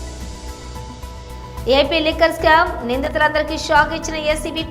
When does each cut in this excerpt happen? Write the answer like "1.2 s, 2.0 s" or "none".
1.2 s